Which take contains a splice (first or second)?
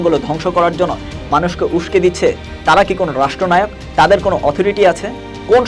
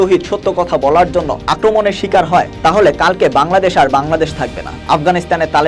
first